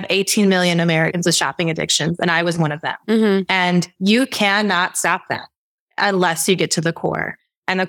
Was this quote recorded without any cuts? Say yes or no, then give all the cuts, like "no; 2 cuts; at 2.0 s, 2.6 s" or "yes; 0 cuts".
yes; 0 cuts